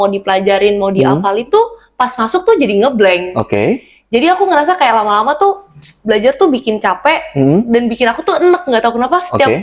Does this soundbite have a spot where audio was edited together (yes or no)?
no